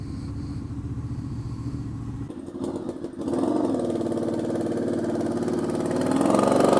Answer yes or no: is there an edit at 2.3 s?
yes